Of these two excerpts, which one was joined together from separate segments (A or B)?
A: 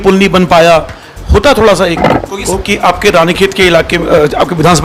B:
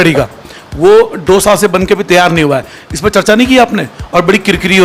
A